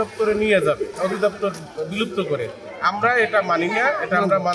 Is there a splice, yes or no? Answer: yes